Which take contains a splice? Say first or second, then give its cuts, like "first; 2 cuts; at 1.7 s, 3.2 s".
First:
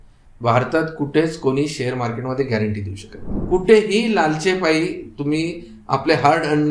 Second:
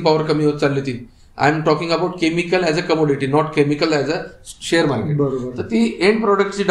first; 1 cut; at 3.4 s